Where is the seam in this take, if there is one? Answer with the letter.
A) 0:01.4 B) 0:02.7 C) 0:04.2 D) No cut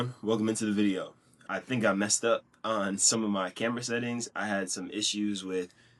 A